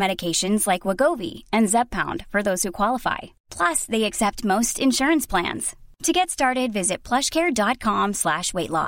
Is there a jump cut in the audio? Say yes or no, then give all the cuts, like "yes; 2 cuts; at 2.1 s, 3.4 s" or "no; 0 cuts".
no; 0 cuts